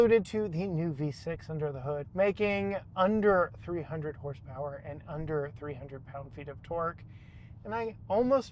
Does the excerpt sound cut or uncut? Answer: cut